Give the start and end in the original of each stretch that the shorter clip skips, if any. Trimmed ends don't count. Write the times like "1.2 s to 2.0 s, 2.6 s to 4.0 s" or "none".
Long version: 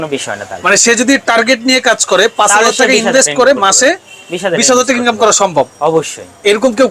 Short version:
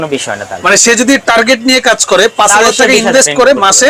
none